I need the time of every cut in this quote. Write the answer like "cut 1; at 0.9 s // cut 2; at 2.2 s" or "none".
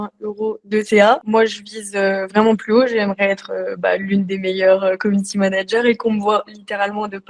cut 1; at 1.2 s